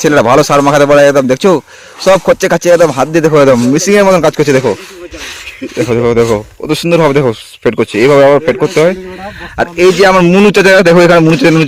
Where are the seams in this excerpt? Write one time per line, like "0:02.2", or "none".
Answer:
none